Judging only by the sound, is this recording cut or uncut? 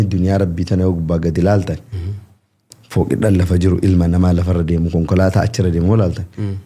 uncut